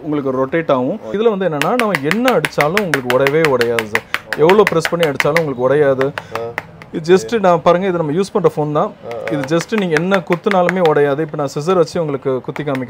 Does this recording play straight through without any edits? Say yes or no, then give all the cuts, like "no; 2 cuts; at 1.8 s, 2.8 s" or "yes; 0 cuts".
no; 1 cut; at 1.2 s